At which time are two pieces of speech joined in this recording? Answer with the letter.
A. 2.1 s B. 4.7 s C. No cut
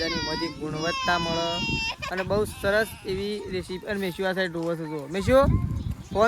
C